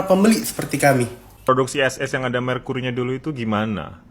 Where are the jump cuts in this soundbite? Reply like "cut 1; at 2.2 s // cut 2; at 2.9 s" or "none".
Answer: cut 1; at 1.3 s